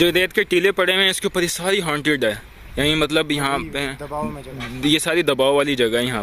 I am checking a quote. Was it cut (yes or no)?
no